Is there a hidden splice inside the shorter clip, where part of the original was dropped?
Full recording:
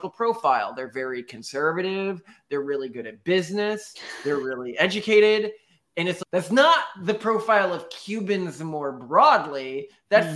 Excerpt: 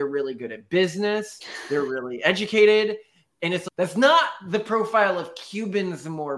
no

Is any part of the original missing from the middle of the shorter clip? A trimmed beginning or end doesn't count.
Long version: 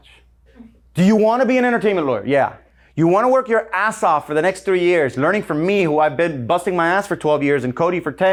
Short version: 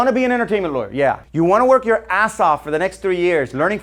yes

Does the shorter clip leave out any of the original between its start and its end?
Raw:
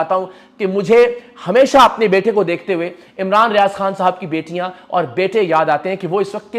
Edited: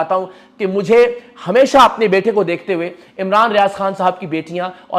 no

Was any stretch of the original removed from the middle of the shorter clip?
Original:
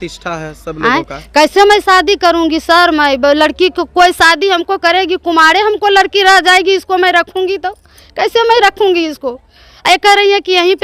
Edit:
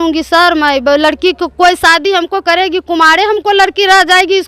no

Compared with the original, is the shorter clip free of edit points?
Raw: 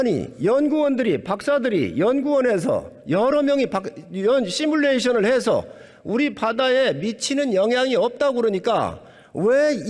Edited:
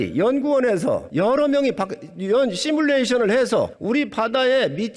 no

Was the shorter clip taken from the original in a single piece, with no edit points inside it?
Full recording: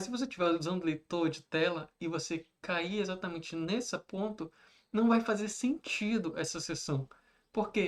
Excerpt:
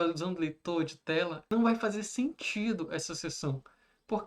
no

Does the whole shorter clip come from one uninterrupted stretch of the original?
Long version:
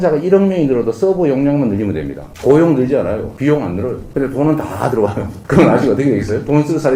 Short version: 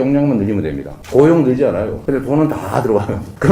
no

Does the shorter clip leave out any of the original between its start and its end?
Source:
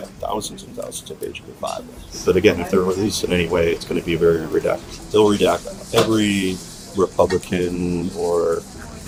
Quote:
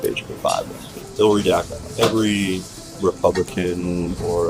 yes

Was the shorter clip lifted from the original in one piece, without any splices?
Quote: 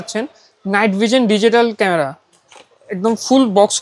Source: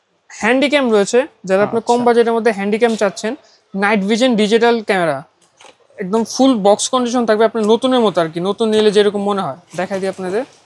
yes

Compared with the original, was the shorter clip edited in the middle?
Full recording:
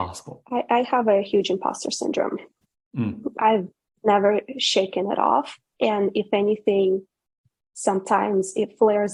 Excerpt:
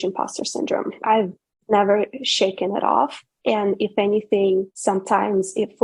yes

